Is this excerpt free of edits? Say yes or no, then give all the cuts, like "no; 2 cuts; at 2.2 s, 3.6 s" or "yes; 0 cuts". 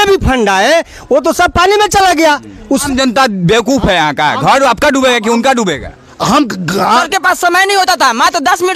no; 2 cuts; at 2.8 s, 7.0 s